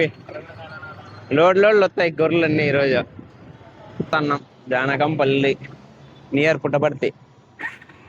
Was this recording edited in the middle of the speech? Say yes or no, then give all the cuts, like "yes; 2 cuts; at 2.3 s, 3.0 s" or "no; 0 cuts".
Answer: yes; 1 cut; at 4.1 s